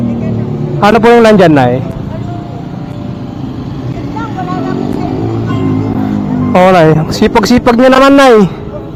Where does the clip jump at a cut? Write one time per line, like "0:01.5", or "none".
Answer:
none